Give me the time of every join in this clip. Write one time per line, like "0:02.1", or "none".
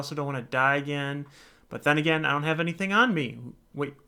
none